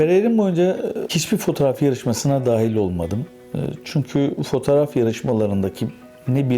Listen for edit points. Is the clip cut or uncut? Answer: cut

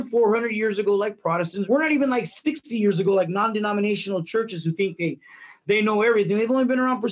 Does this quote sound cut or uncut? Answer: cut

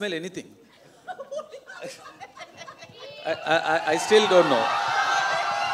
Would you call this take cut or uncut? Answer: uncut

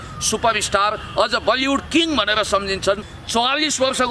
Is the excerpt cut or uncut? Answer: cut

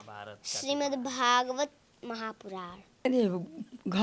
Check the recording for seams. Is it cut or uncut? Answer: cut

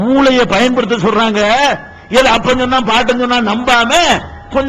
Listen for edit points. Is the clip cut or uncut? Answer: uncut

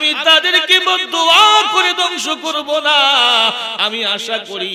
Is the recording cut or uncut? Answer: uncut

